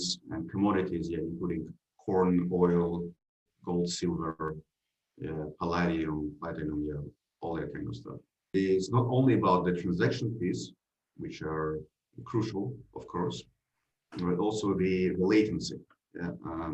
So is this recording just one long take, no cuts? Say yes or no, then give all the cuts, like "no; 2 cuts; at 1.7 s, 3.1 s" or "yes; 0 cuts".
no; 1 cut; at 8.6 s